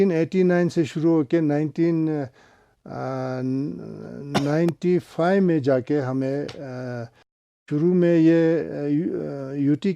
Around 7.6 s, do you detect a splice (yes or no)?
yes